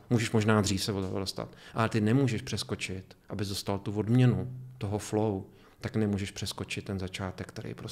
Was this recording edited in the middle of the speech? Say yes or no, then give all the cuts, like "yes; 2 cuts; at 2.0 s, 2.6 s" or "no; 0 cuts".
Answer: no; 0 cuts